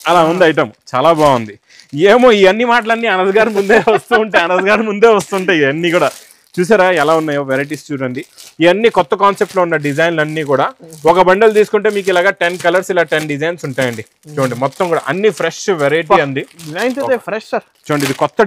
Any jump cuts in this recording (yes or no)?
no